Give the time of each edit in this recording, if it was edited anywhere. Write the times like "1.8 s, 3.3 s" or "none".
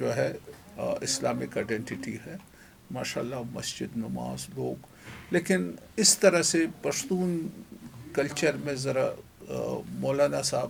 none